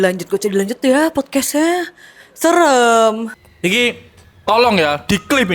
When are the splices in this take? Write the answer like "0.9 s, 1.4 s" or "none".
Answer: 3.3 s